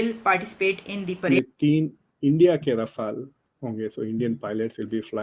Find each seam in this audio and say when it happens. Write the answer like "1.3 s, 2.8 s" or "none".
1.2 s

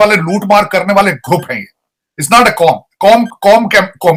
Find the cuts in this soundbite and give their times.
none

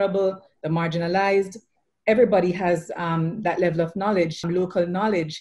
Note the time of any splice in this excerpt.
4.4 s

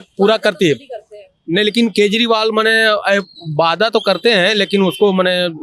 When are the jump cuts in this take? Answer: none

